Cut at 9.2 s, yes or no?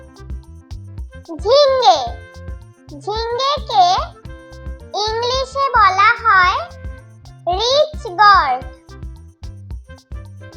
yes